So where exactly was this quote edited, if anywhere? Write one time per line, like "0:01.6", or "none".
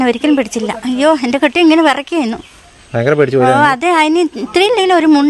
none